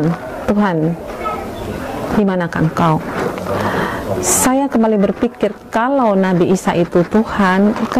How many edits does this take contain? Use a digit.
0